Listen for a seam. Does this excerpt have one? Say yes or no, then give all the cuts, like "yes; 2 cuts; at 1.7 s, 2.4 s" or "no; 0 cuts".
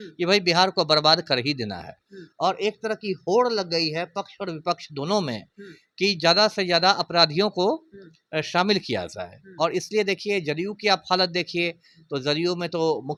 no; 0 cuts